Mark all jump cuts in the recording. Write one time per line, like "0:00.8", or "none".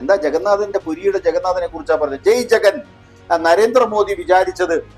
0:03.1